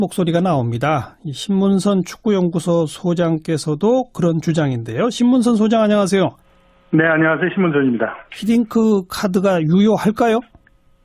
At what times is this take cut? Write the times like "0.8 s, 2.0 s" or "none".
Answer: 1.6 s